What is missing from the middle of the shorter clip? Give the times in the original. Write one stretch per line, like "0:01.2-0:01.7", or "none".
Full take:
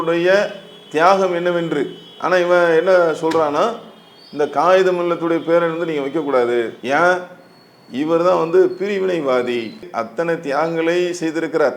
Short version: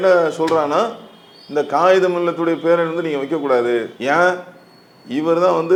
none